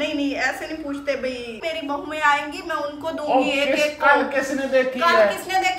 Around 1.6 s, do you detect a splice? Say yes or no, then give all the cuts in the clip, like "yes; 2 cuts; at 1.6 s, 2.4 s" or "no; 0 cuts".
yes; 1 cut; at 1.6 s